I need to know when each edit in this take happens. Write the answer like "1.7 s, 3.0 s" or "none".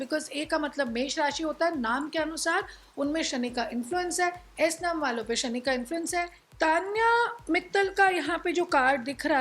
6.4 s